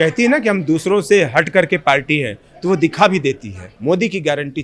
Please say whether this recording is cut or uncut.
cut